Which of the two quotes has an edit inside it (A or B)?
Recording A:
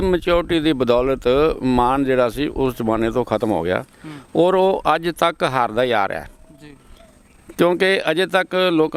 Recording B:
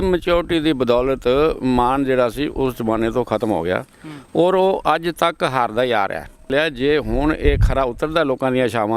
B